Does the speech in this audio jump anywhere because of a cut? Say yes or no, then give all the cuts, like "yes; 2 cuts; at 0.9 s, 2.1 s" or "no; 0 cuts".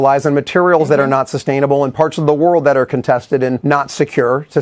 no; 0 cuts